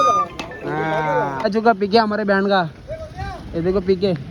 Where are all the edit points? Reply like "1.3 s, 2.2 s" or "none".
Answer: 1.4 s